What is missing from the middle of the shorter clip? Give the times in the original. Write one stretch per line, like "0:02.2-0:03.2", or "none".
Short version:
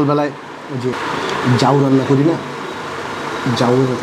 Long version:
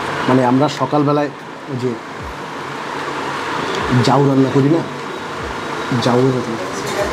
0:01.9-0:03.4